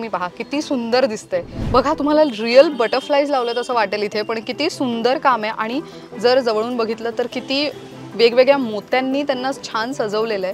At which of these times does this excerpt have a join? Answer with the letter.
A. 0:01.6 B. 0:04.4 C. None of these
A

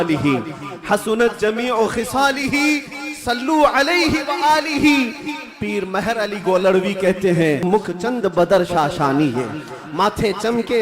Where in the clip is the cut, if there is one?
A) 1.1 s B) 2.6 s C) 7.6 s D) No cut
C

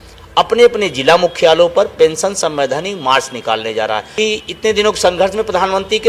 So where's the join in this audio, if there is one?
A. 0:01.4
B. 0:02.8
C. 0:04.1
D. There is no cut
C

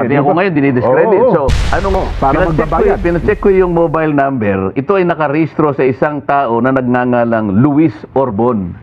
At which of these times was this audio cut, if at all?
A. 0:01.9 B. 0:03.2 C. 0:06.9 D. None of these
A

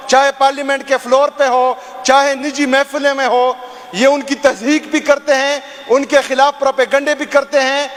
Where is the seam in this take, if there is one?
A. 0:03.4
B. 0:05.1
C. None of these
C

